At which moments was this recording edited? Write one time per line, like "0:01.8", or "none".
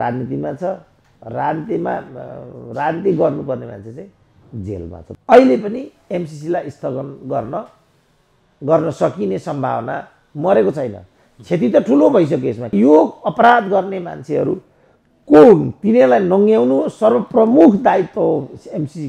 0:05.0
0:12.7